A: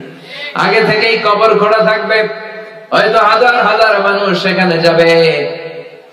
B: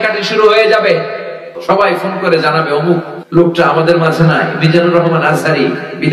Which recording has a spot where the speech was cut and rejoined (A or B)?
B